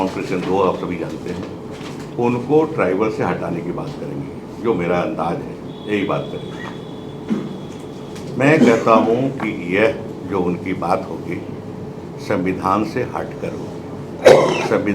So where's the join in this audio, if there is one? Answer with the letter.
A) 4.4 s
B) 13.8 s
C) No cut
C